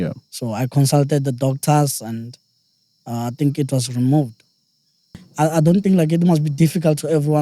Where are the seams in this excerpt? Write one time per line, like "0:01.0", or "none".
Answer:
0:05.2